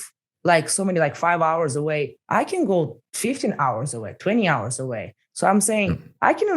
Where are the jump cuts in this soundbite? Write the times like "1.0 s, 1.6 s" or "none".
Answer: 2.2 s, 3.0 s